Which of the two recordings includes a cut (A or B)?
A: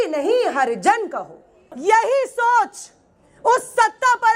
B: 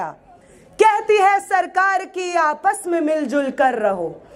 A